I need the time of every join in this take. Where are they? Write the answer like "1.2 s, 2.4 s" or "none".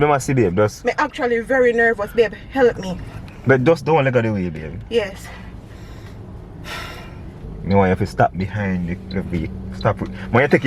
7.5 s